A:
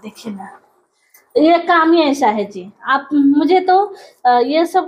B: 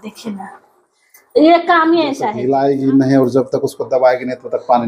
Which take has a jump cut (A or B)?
B